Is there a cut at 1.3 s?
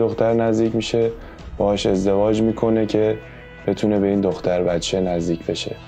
no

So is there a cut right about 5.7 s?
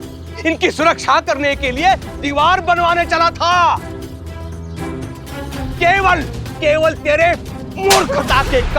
yes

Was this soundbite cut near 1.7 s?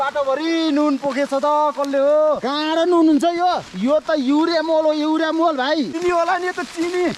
no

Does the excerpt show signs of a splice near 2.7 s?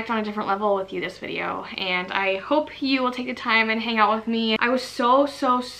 no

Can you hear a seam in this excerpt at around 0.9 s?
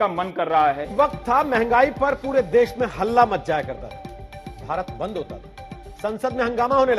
yes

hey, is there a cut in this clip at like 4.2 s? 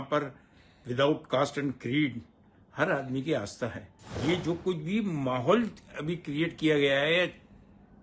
yes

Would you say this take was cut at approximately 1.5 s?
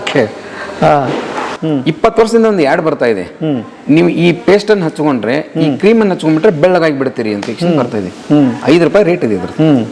yes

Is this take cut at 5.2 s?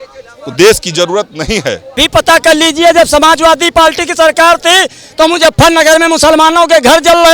no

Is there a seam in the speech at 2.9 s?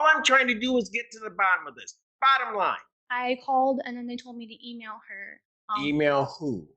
yes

